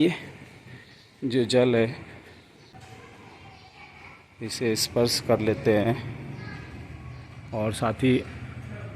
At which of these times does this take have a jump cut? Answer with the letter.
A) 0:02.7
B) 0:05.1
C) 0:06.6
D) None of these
A